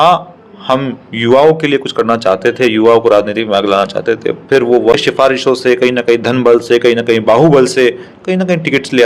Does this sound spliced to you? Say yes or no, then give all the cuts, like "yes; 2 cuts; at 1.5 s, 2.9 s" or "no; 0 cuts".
yes; 1 cut; at 4.9 s